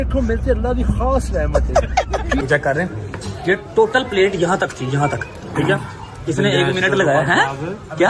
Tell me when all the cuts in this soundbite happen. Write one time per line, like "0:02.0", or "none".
0:02.4